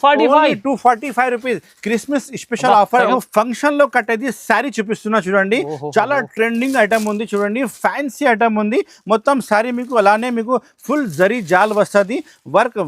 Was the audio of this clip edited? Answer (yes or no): yes